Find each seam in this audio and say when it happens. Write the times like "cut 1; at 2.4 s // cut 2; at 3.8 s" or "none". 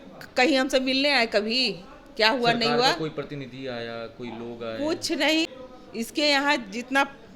cut 1; at 5.6 s